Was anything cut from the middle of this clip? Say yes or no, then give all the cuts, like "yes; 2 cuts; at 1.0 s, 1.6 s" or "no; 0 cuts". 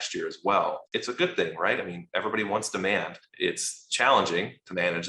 yes; 2 cuts; at 0.8 s, 3.2 s